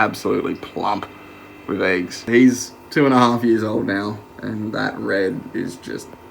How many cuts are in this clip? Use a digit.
1